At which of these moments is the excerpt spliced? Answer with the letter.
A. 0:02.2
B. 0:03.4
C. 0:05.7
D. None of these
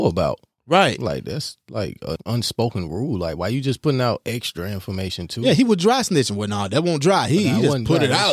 A